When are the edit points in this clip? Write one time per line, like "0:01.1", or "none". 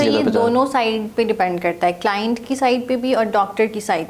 none